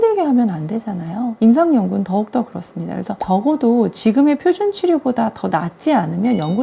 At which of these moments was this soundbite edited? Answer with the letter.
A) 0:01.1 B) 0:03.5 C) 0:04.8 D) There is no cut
D